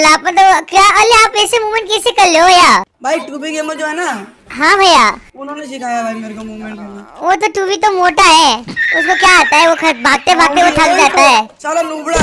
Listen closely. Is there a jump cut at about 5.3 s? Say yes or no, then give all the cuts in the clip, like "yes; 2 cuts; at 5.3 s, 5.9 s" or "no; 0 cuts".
yes; 2 cuts; at 2.9 s, 5.3 s